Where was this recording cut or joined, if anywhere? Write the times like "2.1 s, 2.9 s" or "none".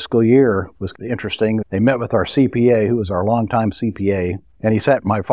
4.4 s